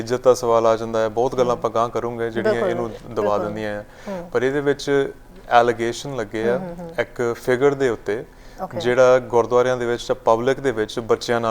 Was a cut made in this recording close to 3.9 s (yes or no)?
no